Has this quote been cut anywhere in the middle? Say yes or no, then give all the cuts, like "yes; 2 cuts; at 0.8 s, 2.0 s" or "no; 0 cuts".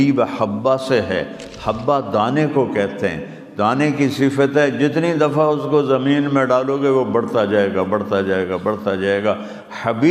no; 0 cuts